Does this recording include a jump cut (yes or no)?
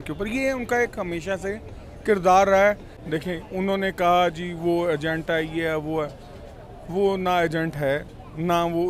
yes